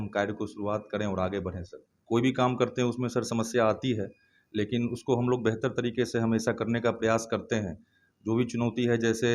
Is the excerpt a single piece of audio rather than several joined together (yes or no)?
no